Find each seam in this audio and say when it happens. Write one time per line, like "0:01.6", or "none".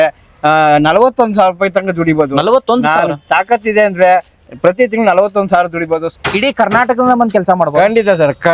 0:06.1